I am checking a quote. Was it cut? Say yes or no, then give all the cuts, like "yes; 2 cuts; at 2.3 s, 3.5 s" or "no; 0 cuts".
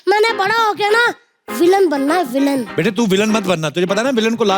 yes; 1 cut; at 2.7 s